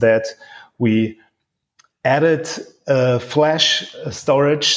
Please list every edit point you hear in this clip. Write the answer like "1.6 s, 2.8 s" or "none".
none